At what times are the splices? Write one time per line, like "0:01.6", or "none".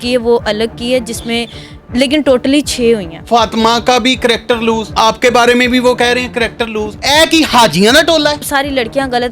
0:03.2
0:04.9
0:06.9
0:08.4